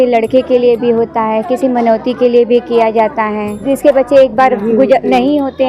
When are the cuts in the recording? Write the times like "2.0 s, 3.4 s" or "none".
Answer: 3.6 s